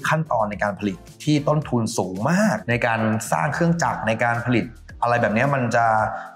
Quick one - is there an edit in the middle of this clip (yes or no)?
no